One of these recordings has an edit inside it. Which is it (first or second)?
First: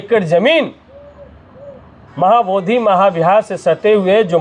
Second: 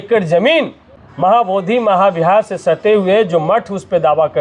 second